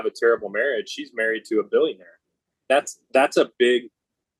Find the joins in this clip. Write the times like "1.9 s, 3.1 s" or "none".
2.7 s